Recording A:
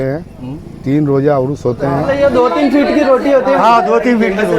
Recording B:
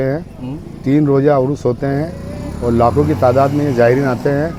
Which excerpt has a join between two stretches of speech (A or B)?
A